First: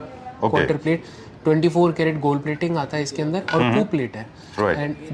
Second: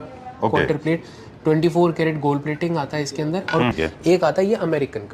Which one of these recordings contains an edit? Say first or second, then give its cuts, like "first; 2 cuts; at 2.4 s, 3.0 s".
second; 1 cut; at 3.7 s